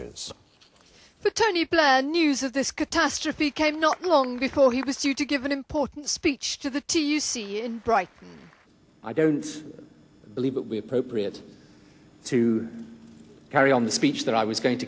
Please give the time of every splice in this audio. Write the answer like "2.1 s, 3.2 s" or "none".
8.0 s

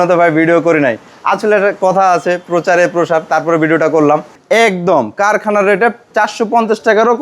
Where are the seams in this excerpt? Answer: 4.4 s, 6.0 s

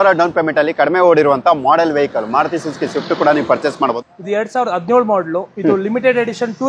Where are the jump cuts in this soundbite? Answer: 3.7 s

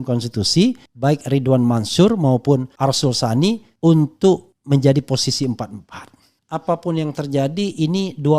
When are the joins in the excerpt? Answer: 0.9 s, 2.7 s, 3.7 s, 4.5 s, 6.4 s

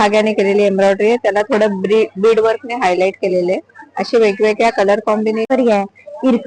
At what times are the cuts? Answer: 5.5 s

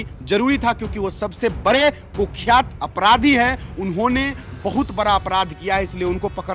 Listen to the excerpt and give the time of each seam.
none

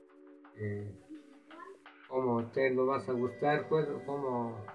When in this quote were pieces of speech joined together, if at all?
none

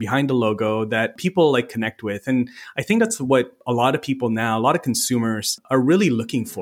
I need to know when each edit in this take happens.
1.2 s, 5.6 s

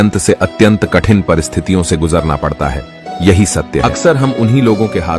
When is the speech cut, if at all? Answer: 3.8 s

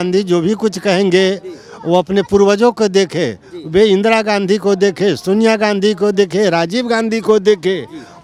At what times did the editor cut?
none

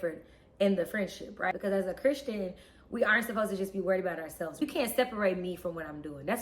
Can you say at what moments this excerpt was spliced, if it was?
1.5 s, 4.6 s

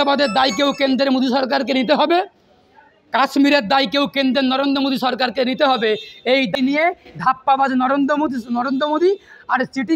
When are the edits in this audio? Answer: none

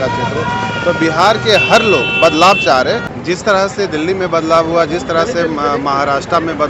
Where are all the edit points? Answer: 3.1 s

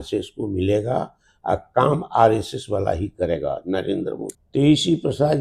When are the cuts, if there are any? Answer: 4.4 s

